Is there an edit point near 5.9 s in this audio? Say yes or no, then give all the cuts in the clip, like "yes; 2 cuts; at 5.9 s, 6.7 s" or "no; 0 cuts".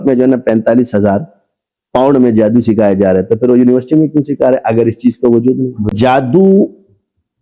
yes; 1 cut; at 5.9 s